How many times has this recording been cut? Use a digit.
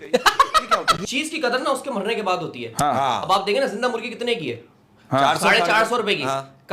1